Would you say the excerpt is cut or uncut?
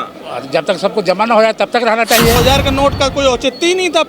cut